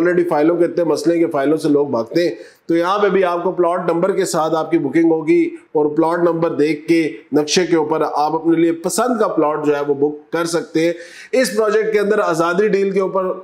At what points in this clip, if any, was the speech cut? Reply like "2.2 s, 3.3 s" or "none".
none